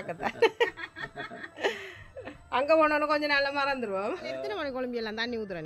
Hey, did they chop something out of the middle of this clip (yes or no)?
yes